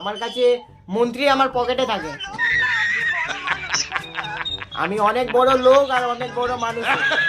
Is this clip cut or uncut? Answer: uncut